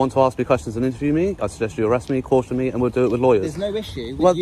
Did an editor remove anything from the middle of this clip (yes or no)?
no